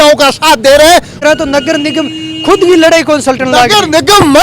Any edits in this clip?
yes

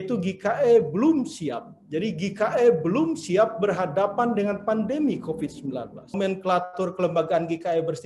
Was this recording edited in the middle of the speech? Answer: yes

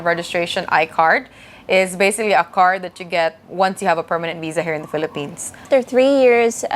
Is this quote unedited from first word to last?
no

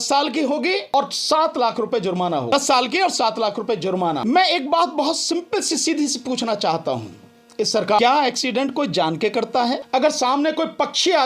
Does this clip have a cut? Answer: yes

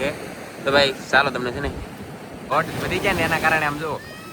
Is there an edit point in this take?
yes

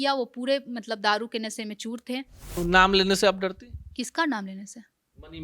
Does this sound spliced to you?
yes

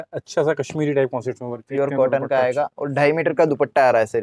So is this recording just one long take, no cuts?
no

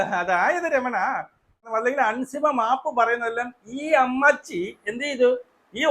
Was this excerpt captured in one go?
no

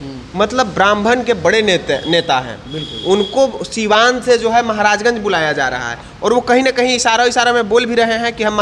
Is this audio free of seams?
yes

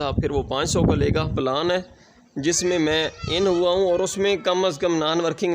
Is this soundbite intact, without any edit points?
no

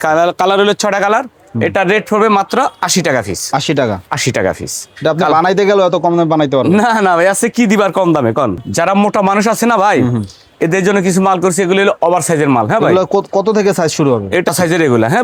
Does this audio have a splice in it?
no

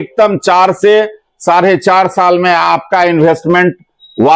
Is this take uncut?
yes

